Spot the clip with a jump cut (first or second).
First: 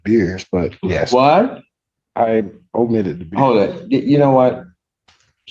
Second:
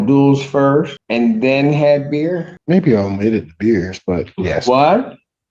second